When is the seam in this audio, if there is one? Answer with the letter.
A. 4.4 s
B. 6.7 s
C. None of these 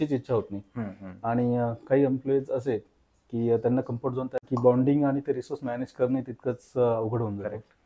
A